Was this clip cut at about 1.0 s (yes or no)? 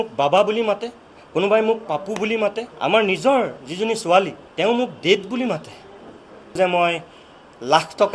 no